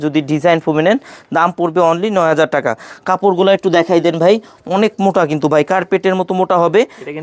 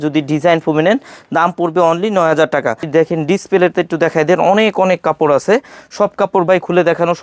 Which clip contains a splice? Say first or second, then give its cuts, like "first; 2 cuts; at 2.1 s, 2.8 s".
second; 1 cut; at 2.9 s